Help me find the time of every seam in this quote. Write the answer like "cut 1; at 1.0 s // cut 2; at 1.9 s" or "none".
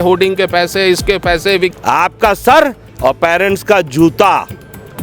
cut 1; at 1.7 s